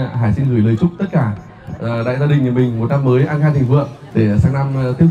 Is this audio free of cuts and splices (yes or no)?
no